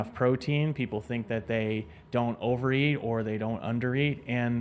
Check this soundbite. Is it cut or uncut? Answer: uncut